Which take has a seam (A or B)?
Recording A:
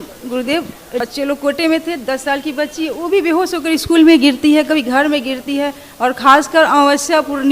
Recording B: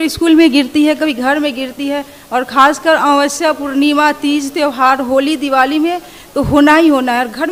A